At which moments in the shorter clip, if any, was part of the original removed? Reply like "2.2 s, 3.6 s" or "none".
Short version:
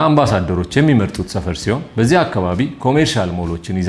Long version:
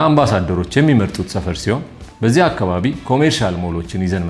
1.9 s